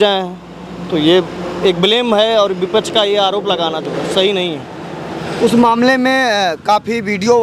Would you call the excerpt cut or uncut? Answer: uncut